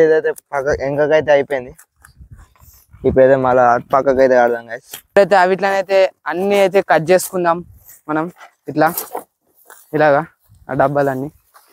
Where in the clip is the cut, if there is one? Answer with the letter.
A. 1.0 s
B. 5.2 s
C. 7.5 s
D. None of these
B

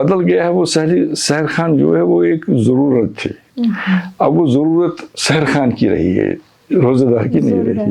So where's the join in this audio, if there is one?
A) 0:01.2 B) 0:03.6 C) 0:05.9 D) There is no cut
D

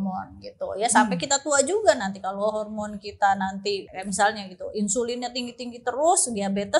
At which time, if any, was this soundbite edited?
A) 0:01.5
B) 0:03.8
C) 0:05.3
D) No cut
B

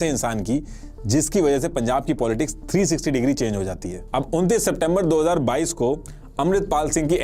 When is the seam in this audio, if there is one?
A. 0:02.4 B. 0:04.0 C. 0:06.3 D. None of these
B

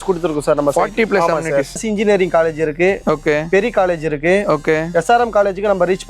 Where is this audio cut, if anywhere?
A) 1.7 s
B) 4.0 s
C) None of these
A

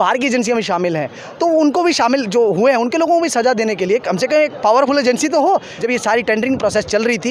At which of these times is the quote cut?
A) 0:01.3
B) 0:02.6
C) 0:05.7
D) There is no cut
C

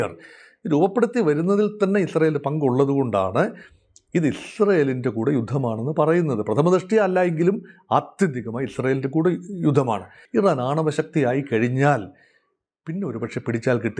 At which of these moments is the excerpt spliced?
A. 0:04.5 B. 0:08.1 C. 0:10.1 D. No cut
C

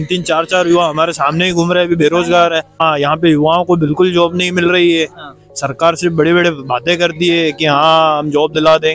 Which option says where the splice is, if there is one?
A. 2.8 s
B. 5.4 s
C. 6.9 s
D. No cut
A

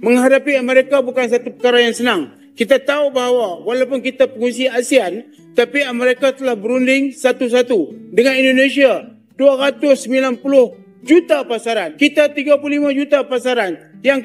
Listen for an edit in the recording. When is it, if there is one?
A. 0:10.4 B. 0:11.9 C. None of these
B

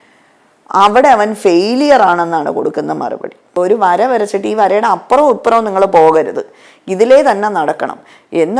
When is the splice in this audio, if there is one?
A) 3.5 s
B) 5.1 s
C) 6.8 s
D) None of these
A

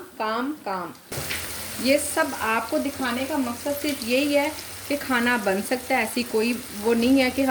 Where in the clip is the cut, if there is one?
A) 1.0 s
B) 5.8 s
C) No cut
A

